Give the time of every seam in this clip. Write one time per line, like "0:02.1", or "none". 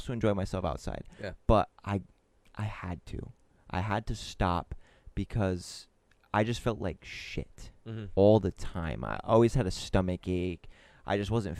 none